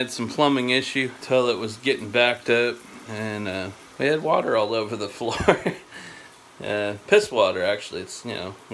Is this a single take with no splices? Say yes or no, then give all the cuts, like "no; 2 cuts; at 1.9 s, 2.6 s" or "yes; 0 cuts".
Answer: no; 2 cuts; at 1.2 s, 3.8 s